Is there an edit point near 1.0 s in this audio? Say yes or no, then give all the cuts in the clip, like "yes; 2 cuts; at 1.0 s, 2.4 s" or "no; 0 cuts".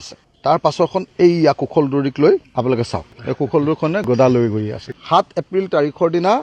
no; 1 cut; at 4.8 s